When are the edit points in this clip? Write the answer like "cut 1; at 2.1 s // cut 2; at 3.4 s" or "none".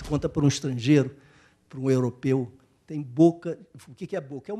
none

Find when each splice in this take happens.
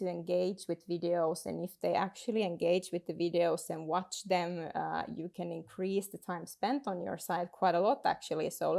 none

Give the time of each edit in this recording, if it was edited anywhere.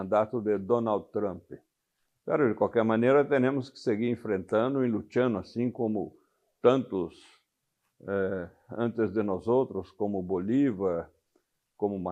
none

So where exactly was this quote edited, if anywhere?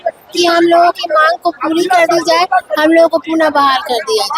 none

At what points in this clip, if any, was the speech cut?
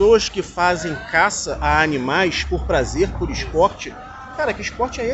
none

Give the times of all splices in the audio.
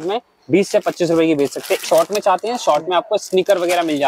cut 1; at 1.8 s

